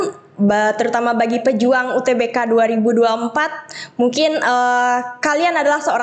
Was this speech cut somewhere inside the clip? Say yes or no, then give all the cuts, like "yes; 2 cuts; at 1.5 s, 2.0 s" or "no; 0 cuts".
no; 0 cuts